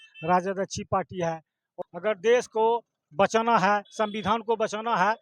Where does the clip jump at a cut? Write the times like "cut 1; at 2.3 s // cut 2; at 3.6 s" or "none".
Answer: cut 1; at 1.6 s